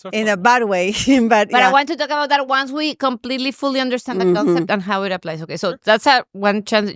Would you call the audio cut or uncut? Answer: uncut